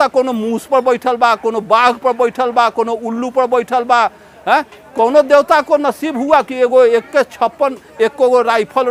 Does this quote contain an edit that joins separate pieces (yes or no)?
no